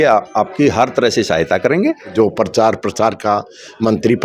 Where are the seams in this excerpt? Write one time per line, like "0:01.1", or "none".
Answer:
0:02.1